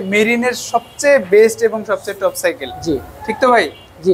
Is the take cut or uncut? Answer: uncut